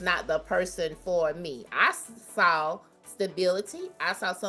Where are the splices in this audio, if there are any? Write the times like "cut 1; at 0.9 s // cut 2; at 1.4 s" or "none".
none

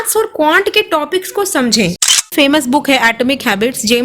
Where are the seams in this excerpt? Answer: cut 1; at 2.3 s

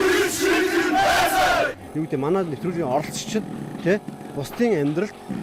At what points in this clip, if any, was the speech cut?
cut 1; at 1.8 s

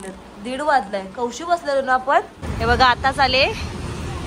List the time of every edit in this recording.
cut 1; at 2.4 s

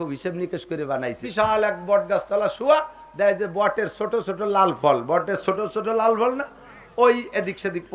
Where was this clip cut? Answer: cut 1; at 1.2 s

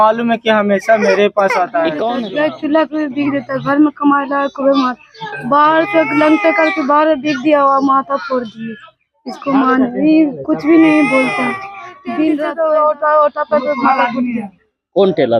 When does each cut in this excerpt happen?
cut 1; at 2.2 s // cut 2; at 12.3 s

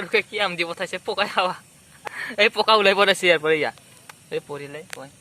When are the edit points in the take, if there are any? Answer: cut 1; at 2.0 s

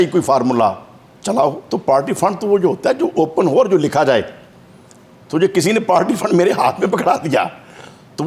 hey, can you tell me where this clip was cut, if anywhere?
cut 1; at 1.6 s

